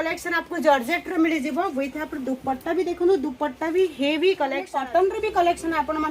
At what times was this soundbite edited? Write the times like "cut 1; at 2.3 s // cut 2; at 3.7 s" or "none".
cut 1; at 4.7 s